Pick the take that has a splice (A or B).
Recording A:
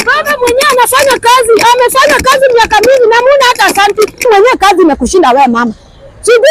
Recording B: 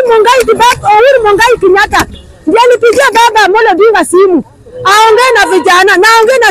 A